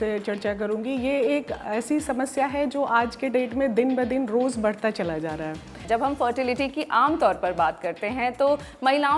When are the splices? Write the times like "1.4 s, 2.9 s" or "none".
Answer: 5.8 s